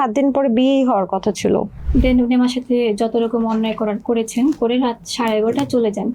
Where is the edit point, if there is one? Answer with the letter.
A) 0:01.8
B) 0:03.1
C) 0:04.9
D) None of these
A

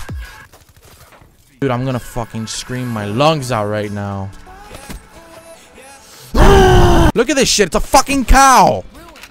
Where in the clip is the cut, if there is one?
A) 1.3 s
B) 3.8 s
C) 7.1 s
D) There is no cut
C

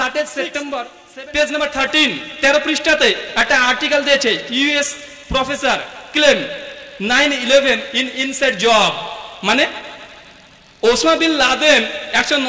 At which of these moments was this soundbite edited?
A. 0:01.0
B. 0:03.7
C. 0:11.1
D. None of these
A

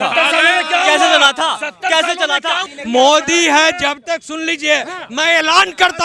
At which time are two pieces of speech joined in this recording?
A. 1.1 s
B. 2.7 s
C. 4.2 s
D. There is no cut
B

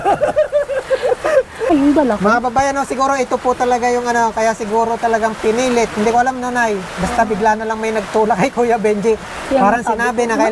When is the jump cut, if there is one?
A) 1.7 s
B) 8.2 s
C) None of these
A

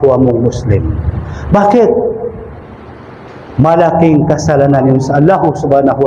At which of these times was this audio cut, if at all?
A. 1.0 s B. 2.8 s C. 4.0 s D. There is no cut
D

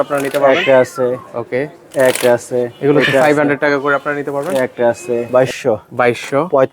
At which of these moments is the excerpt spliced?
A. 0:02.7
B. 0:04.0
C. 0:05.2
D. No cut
C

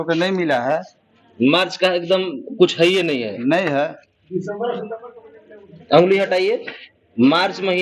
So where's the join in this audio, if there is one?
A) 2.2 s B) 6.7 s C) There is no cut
C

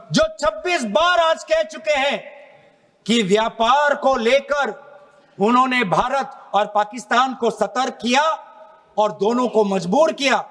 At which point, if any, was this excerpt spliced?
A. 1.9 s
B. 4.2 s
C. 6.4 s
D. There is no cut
D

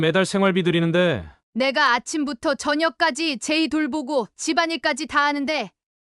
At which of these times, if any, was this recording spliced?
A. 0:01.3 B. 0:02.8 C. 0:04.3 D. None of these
A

